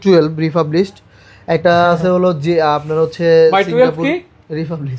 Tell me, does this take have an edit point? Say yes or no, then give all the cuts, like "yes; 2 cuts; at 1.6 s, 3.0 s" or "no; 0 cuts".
no; 0 cuts